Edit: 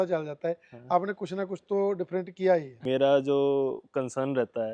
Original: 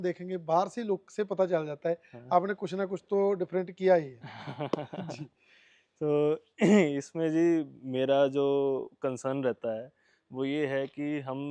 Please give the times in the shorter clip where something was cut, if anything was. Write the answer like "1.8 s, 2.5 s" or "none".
2.7 s